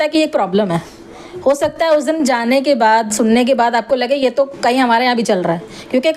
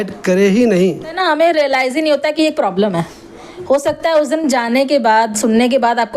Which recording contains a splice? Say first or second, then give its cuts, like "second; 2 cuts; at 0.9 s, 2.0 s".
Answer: second; 1 cut; at 1.2 s